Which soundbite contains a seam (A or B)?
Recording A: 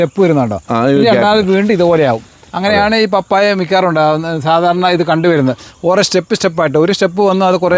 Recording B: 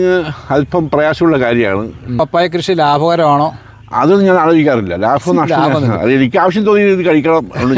B